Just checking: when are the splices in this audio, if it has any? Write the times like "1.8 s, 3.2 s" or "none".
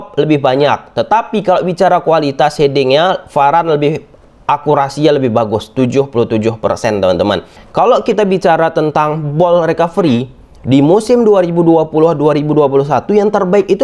7.6 s